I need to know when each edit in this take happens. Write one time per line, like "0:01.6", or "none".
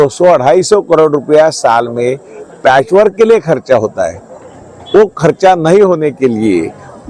none